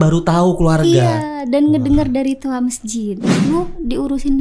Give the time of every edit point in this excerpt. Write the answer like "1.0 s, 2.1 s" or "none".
3.3 s